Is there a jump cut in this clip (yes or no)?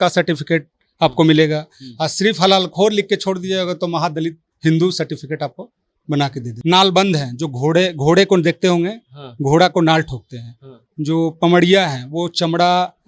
yes